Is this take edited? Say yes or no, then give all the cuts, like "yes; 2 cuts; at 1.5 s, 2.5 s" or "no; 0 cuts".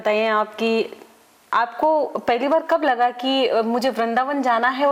no; 0 cuts